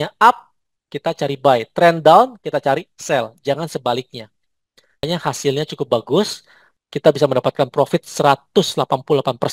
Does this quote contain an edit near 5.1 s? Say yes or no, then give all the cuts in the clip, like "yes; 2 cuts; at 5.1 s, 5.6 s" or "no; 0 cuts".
yes; 1 cut; at 5.1 s